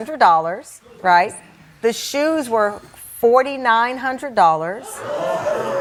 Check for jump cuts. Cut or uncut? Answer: uncut